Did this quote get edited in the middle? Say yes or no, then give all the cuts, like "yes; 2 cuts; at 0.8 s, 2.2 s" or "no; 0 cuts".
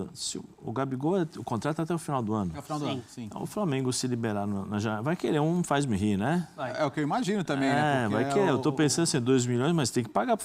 no; 0 cuts